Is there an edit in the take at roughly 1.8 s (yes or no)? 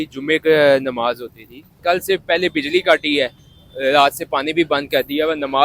yes